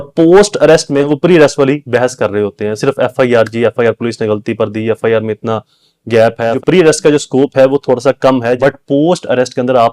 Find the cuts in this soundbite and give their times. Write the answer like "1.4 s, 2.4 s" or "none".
1.1 s, 6.5 s, 8.6 s